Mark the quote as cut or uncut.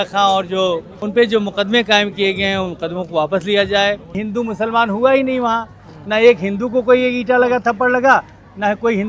cut